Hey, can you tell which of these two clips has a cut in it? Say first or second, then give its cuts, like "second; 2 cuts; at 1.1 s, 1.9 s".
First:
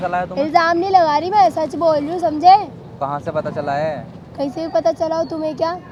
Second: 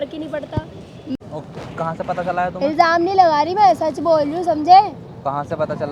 second; 1 cut; at 1.2 s